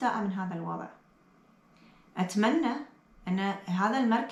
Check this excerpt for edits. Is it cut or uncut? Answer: uncut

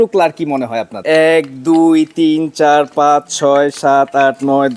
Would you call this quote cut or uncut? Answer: cut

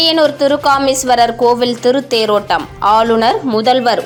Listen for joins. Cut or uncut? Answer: uncut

